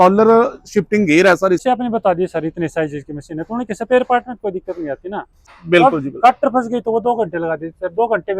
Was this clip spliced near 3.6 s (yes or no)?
no